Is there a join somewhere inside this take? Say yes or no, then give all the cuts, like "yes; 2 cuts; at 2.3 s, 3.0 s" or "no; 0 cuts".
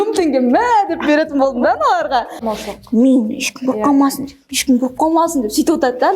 yes; 1 cut; at 2.4 s